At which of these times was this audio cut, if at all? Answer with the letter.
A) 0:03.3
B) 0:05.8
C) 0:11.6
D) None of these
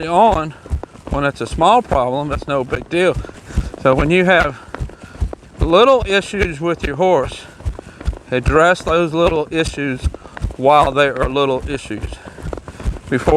A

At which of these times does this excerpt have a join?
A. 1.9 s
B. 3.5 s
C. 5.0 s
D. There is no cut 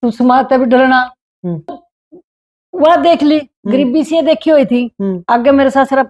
A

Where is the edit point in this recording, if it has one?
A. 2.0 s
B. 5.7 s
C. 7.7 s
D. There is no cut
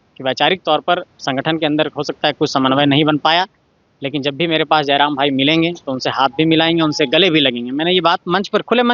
D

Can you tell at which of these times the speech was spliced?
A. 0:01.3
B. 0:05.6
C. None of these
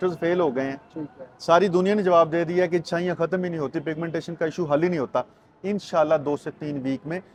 C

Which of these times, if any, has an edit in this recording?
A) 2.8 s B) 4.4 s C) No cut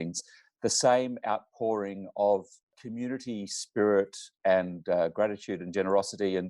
A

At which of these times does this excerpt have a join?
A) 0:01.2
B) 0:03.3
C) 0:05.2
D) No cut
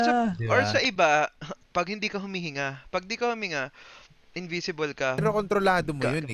C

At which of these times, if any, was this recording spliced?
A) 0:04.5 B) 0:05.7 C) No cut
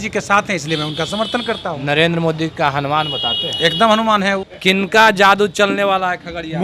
A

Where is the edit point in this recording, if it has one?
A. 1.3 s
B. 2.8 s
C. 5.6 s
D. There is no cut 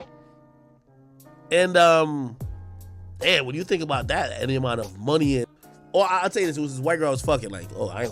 C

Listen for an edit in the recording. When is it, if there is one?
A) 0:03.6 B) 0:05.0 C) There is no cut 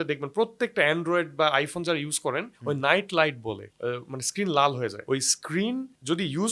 B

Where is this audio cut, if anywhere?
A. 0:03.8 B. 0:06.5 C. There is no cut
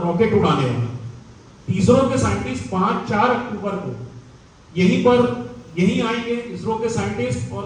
C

